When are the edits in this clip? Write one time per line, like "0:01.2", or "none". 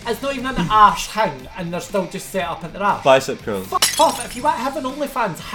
none